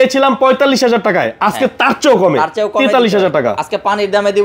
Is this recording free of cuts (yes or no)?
yes